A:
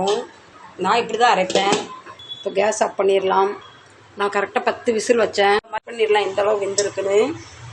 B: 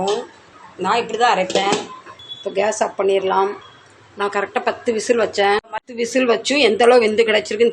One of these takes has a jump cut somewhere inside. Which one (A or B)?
A